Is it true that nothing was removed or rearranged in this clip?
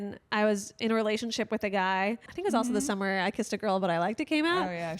no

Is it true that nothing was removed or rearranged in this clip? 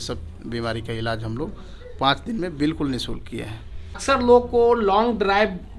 no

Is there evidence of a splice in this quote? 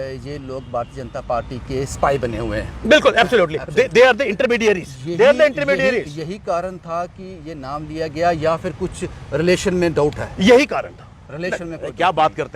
no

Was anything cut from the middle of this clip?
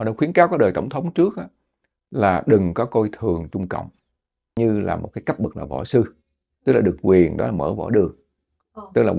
yes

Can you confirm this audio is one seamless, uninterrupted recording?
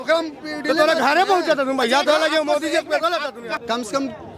no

